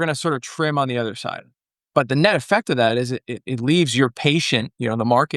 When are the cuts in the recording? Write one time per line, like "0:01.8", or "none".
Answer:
none